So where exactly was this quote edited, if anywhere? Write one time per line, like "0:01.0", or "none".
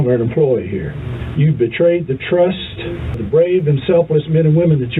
0:01.0
0:03.2